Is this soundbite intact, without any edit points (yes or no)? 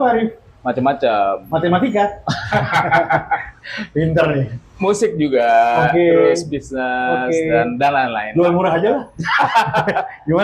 yes